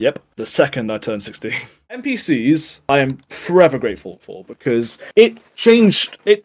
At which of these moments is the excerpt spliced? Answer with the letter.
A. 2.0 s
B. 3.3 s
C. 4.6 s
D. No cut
A